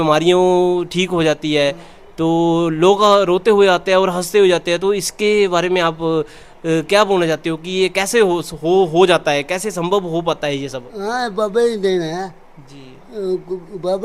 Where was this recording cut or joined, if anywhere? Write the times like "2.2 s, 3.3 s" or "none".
none